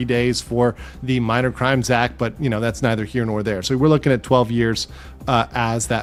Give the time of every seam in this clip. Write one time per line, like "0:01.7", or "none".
none

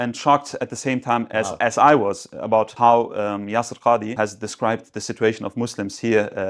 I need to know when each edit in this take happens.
0:01.5
0:02.7
0:04.1

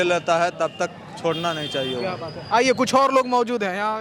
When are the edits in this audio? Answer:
none

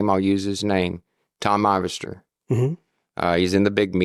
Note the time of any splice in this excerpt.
none

